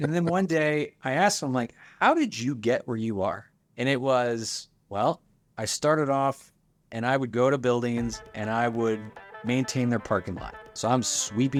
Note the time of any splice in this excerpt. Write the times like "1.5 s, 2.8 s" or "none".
none